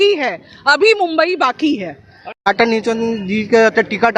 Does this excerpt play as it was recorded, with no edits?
no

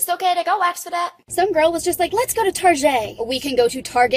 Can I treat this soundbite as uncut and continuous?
no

